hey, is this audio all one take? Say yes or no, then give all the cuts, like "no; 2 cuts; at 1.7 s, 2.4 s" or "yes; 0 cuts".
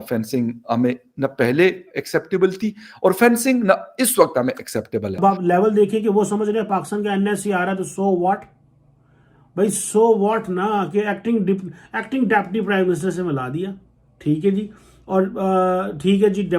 no; 1 cut; at 5.2 s